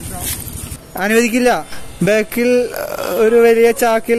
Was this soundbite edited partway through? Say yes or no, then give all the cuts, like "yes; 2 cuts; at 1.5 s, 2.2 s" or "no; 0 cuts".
yes; 1 cut; at 0.9 s